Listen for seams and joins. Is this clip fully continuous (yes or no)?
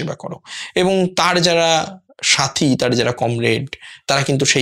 yes